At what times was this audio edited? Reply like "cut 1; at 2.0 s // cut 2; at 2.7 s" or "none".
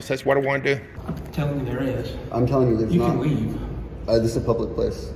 cut 1; at 0.9 s